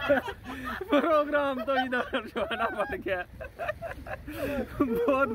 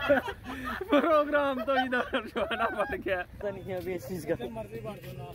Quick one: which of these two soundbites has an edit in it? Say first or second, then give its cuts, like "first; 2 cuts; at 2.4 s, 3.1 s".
second; 1 cut; at 3.4 s